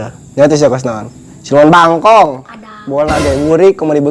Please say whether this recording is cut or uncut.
uncut